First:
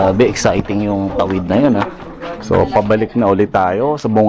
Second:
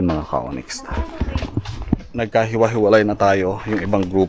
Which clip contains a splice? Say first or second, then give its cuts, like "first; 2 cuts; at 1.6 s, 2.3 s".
first; 1 cut; at 2.0 s